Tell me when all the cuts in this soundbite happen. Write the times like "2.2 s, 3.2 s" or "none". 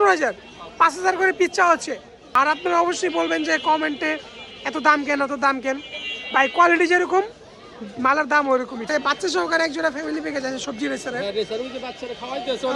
2.1 s, 8.9 s